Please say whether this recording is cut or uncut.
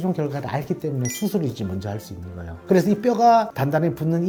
uncut